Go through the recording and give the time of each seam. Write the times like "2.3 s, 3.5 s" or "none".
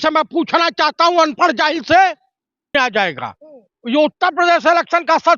2.7 s

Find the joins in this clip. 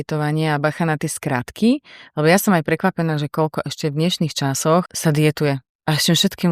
4.9 s

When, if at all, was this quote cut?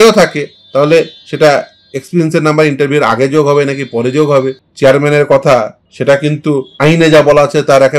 4.6 s, 5.8 s, 6.7 s

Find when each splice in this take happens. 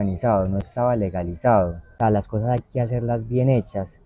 1.8 s

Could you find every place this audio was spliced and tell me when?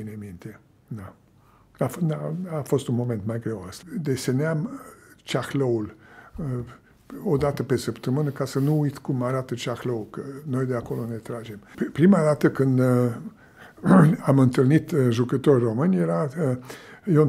3.8 s, 11.7 s

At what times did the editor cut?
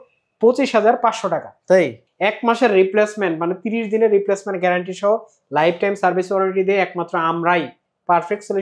2.0 s

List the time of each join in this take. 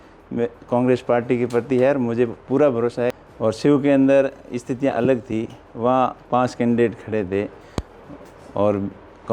3.2 s

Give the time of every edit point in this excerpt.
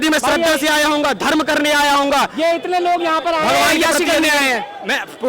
none

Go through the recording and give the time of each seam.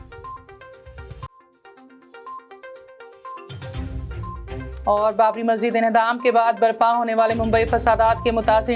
1.1 s

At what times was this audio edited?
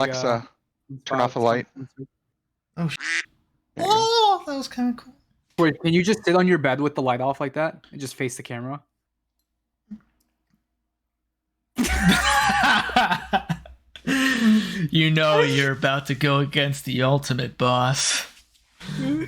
5.5 s

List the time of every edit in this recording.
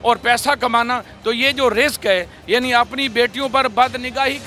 none

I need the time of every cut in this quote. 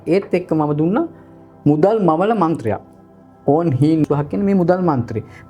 4.0 s

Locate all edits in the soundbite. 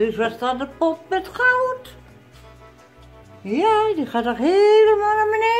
none

